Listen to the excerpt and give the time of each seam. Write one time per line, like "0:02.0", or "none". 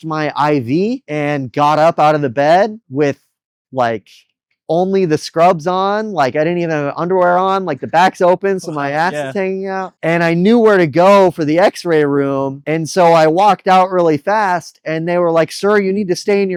none

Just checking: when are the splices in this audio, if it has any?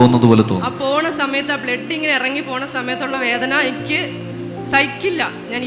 none

